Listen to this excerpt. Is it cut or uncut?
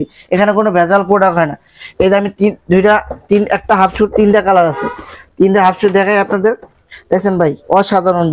uncut